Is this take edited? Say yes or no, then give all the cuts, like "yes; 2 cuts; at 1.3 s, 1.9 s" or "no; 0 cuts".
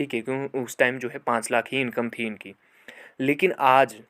no; 0 cuts